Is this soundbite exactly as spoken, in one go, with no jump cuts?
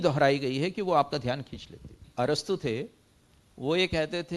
no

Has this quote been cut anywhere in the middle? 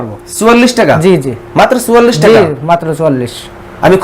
no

